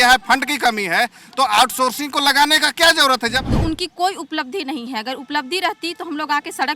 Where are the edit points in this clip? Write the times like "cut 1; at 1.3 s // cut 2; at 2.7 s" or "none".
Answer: cut 1; at 3.4 s